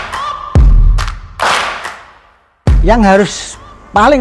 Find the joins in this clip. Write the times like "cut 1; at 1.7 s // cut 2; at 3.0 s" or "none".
cut 1; at 2.6 s